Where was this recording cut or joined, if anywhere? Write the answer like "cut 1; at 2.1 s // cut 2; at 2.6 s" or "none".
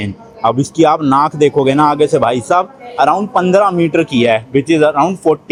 none

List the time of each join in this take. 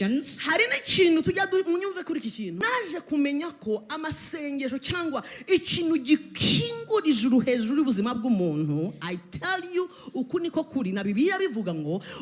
cut 1; at 2.6 s

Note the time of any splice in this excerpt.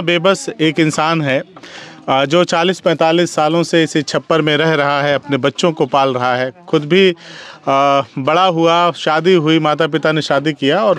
none

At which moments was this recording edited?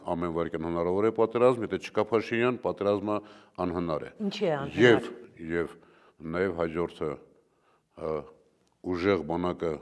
none

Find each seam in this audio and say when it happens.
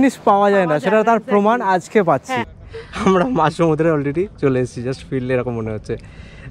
cut 1; at 2.5 s

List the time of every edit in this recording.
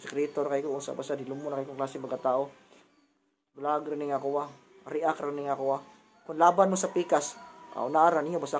none

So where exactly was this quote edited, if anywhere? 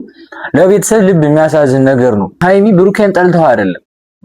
cut 1; at 2.4 s

